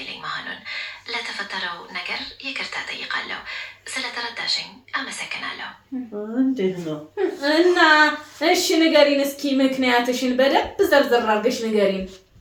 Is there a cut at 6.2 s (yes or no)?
no